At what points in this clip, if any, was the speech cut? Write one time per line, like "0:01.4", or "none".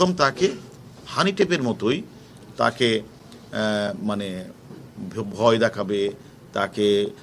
none